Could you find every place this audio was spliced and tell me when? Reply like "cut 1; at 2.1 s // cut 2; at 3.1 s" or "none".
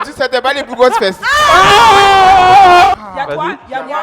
cut 1; at 2.9 s